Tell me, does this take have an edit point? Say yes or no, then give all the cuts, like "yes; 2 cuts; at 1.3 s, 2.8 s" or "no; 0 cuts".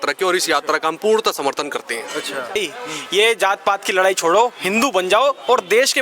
yes; 1 cut; at 2.6 s